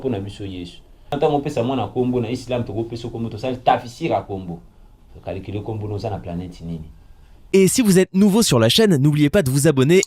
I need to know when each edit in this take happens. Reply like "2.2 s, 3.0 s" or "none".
1.1 s, 7.3 s